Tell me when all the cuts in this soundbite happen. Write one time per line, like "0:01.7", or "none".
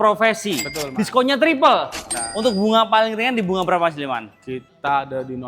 0:02.1